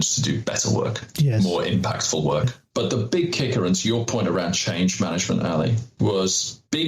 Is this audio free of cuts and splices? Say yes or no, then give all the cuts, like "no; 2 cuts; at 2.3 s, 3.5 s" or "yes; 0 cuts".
no; 1 cut; at 2.6 s